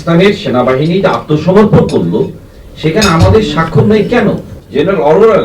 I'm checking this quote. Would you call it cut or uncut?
cut